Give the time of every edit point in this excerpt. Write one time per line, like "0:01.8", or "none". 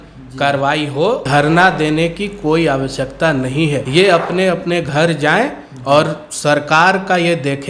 0:01.2
0:03.8